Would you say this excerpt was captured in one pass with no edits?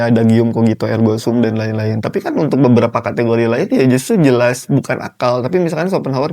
yes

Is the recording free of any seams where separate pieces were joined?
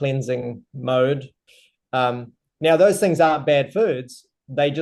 no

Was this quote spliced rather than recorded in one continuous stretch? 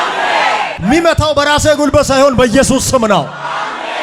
no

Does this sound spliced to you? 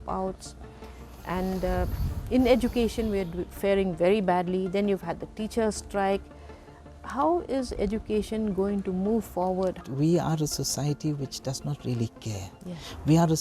yes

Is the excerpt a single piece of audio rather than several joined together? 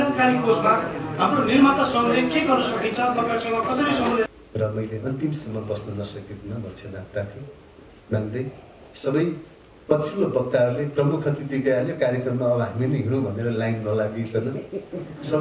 no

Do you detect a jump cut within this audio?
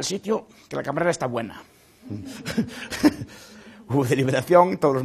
no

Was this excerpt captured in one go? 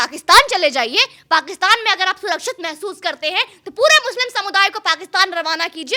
yes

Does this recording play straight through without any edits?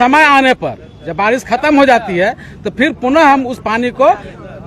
yes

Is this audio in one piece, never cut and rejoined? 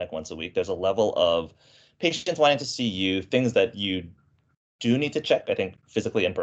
yes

